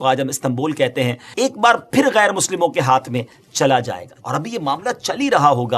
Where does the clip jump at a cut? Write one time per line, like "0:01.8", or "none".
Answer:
0:01.2
0:04.1